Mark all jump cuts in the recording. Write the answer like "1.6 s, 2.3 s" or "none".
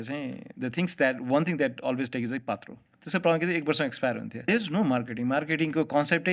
2.9 s, 4.4 s